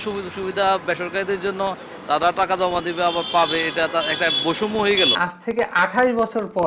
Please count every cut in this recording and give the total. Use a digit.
1